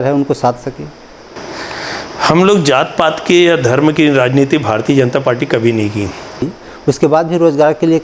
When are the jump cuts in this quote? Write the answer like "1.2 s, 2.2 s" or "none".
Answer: 6.6 s